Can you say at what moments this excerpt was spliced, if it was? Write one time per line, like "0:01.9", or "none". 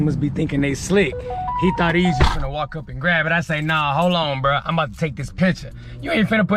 none